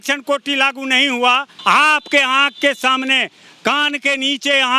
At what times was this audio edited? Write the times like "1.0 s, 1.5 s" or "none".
1.5 s